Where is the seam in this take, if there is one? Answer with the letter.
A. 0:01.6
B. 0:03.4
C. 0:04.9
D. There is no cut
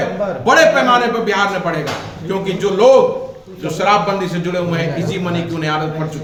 D